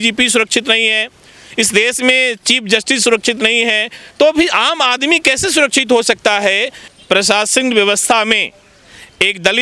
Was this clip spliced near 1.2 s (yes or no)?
no